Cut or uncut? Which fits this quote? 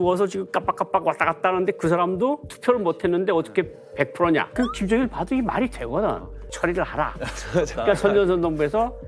cut